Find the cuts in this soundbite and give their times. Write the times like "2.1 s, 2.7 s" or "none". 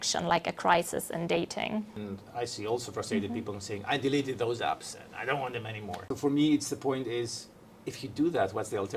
2.0 s, 6.0 s